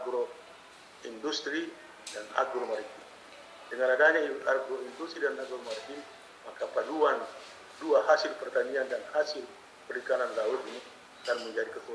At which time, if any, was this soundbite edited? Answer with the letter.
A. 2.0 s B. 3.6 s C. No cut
C